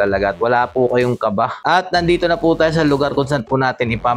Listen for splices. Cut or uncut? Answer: cut